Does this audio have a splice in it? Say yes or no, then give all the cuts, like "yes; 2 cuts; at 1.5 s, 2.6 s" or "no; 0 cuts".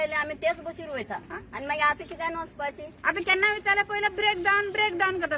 no; 0 cuts